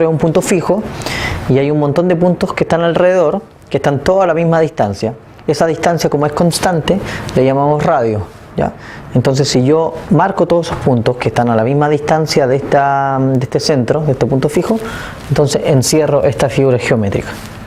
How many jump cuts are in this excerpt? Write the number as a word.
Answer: zero